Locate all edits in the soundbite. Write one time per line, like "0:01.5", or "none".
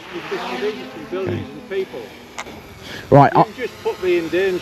none